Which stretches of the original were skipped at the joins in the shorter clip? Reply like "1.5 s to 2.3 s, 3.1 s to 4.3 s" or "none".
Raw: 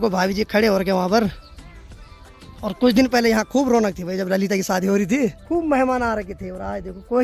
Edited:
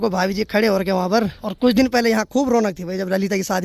1.4 s to 2.6 s